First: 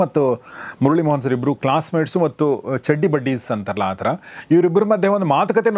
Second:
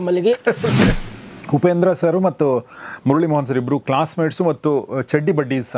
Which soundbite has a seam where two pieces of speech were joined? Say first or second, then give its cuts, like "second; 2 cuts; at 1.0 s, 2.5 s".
second; 1 cut; at 1.0 s